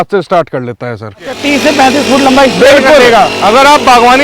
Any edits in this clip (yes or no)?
yes